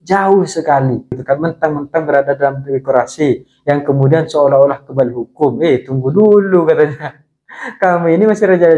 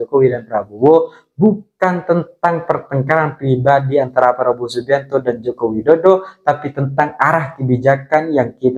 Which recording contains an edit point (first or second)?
first